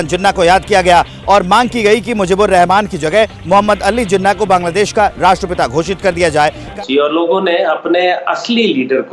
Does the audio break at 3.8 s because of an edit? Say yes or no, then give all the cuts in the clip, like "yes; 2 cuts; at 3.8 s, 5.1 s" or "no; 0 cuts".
no; 1 cut; at 6.7 s